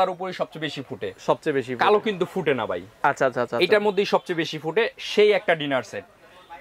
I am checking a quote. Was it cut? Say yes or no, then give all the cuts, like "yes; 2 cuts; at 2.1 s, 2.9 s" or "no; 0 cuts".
no; 0 cuts